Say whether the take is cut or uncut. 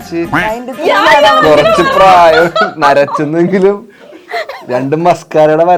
uncut